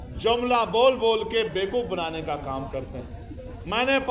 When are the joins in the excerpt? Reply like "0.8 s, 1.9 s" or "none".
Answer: none